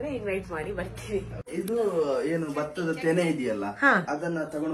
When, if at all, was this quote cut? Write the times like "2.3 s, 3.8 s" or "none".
1.5 s